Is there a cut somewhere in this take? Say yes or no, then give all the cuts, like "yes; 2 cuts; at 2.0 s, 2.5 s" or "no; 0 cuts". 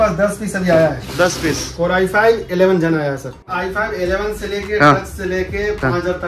yes; 1 cut; at 3.5 s